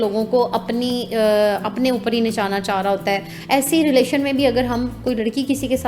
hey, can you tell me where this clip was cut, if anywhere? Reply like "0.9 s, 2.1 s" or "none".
3.3 s